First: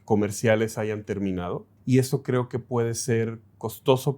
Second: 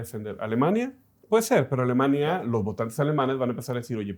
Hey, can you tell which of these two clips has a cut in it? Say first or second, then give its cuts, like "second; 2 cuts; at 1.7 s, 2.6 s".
first; 1 cut; at 1.7 s